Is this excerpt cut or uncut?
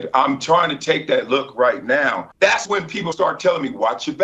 cut